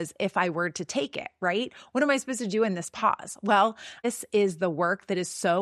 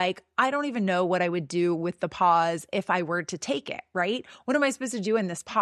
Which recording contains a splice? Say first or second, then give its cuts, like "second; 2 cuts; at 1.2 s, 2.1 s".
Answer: first; 1 cut; at 4.0 s